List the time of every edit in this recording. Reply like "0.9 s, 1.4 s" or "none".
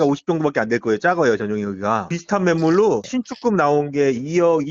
2.1 s